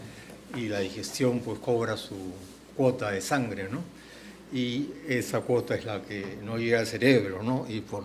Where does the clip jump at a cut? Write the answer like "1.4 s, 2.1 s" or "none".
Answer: none